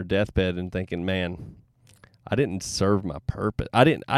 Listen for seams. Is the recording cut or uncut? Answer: uncut